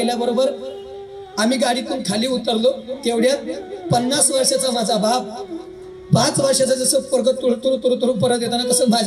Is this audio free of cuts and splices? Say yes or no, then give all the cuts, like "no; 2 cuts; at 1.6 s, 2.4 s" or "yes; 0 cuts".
yes; 0 cuts